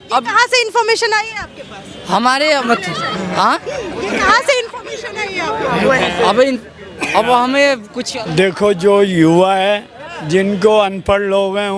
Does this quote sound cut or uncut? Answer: cut